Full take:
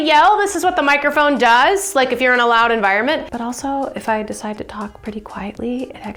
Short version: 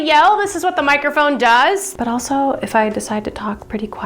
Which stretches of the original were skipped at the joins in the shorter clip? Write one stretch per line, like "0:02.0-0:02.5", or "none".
0:01.9-0:03.2

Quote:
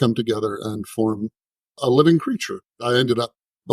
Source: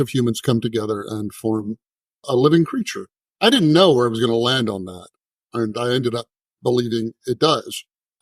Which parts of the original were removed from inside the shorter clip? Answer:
0:03.3-0:05.8

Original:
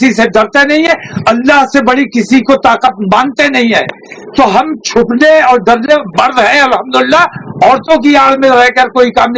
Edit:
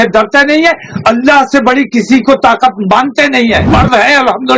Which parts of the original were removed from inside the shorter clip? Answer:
0:03.9-0:06.1

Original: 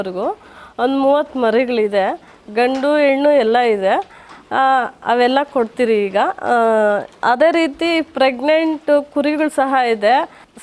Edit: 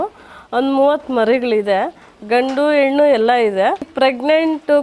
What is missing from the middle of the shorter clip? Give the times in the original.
0:04.1-0:08.1

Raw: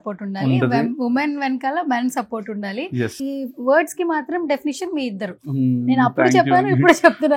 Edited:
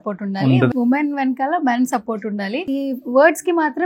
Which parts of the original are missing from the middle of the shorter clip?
0:00.7-0:01.0
0:02.9-0:03.2

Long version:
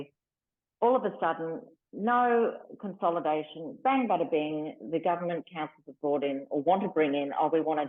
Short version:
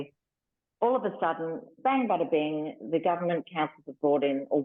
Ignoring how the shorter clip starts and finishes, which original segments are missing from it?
0:01.7-0:03.7

